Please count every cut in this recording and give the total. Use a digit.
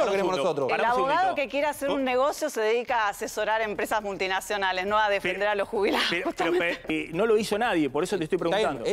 1